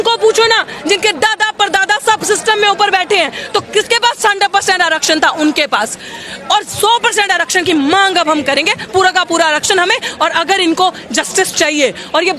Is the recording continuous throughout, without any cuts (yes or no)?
yes